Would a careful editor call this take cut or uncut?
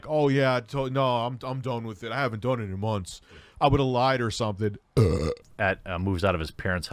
cut